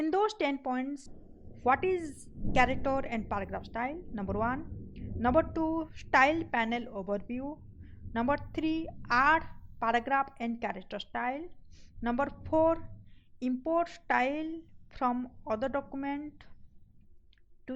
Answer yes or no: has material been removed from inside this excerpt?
yes